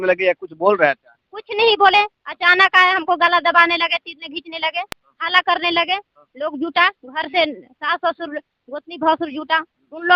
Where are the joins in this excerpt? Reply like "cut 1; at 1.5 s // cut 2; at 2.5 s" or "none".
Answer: none